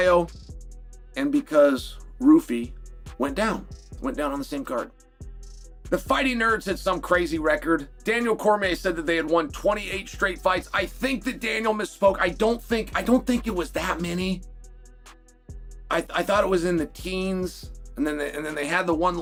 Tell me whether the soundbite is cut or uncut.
uncut